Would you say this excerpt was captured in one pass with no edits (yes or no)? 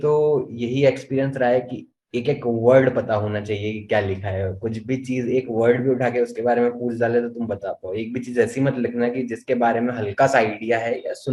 yes